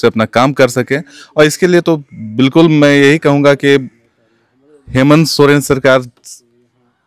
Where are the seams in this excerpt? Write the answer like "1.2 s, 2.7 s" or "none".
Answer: none